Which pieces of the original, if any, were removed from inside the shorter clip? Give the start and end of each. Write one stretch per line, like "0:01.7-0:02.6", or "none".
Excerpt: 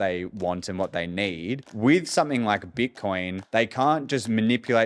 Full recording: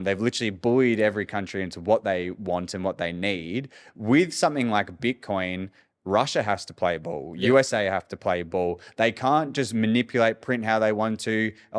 0:03.7-0:03.9
0:05.7-0:08.9